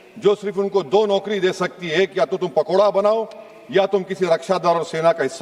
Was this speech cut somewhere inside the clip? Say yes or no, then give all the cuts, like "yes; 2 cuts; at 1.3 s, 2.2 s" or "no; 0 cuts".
no; 0 cuts